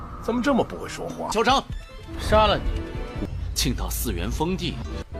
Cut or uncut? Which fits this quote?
uncut